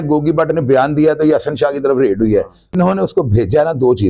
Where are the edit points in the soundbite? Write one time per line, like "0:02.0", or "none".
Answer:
0:02.8